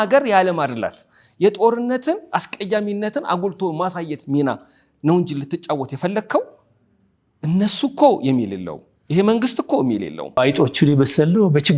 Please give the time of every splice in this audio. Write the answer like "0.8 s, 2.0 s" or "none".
10.4 s